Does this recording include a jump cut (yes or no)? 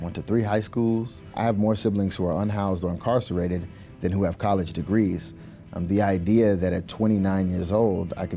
yes